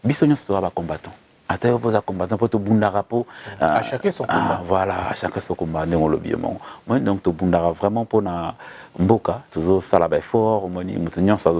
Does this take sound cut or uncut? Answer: uncut